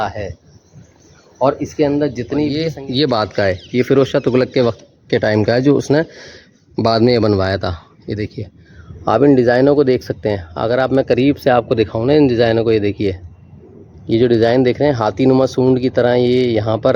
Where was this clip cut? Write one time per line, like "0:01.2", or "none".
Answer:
0:02.5